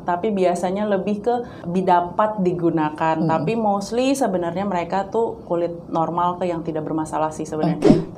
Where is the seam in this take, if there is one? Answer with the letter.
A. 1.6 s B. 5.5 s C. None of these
A